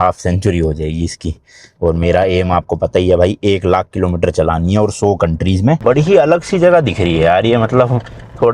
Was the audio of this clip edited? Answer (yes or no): yes